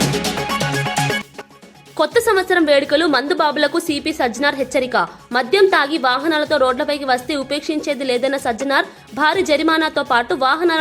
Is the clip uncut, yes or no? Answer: no